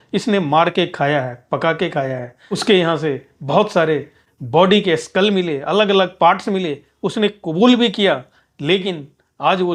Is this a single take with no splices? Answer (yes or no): yes